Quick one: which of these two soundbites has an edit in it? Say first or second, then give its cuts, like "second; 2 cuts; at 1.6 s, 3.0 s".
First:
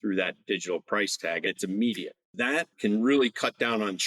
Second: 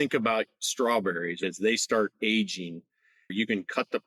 first; 2 cuts; at 1.5 s, 2.7 s